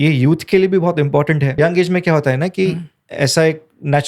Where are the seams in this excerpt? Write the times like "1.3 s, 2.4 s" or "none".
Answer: 1.6 s

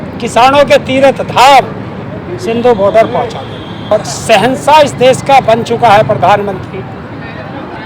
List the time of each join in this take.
3.9 s

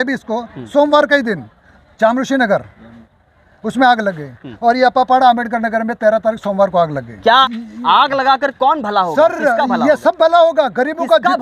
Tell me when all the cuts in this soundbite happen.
7.4 s

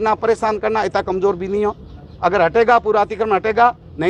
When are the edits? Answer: none

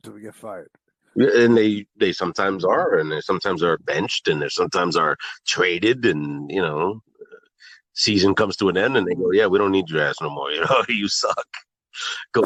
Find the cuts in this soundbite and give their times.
none

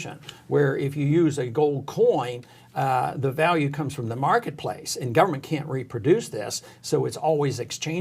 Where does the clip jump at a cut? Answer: none

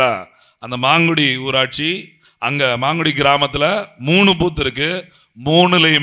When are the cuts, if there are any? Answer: none

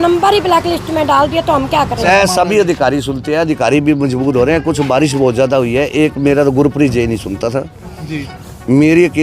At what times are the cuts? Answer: 2.0 s

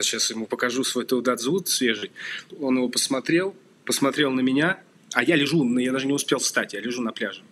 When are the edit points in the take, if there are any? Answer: 2.5 s

